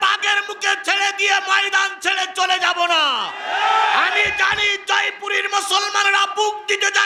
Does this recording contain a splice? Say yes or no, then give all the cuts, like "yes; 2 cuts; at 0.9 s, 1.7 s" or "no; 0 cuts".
no; 0 cuts